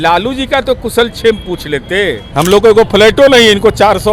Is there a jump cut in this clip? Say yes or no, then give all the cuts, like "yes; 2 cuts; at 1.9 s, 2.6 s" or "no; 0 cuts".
yes; 1 cut; at 2.2 s